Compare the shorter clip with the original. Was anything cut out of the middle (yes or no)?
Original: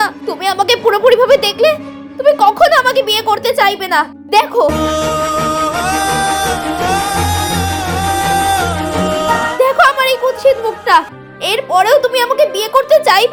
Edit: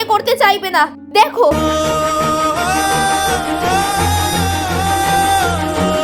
no